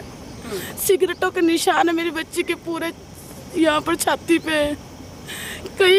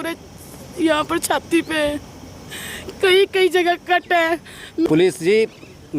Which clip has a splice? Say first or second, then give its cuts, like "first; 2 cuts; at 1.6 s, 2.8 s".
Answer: second; 1 cut; at 4.9 s